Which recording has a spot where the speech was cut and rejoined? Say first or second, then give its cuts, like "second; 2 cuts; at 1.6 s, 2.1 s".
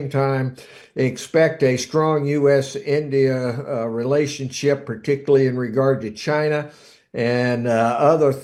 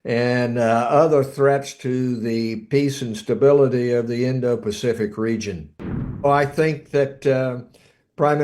second; 1 cut; at 6.2 s